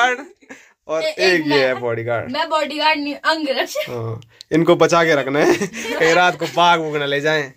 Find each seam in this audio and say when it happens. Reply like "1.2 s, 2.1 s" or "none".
none